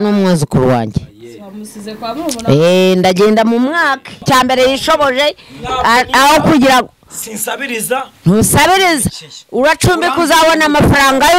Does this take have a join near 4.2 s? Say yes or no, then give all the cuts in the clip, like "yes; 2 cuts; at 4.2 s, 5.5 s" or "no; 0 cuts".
yes; 1 cut; at 4.2 s